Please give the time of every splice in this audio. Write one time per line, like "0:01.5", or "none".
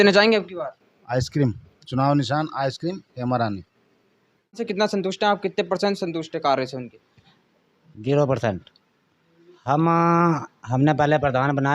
0:04.6

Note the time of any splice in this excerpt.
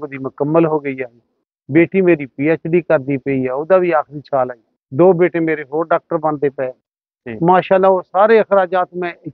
none

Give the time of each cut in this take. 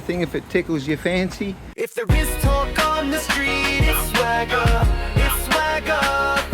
0:01.6

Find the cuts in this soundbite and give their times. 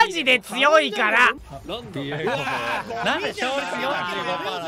0:01.5

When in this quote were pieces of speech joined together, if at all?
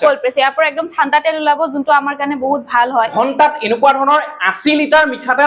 0:03.1

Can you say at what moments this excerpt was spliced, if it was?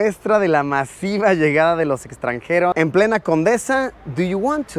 none

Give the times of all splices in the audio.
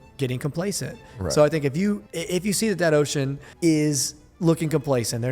0:02.1
0:03.4

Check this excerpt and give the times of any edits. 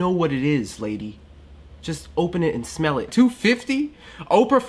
0:03.1

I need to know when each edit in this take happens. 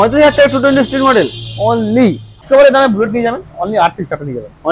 0:02.3

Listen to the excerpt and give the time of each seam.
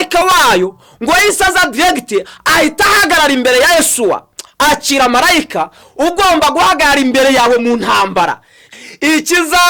0:08.7

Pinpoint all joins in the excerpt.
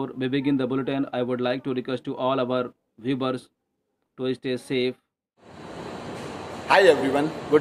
0:05.3

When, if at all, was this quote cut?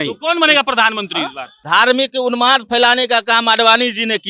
0:01.6

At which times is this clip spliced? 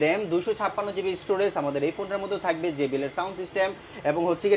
none

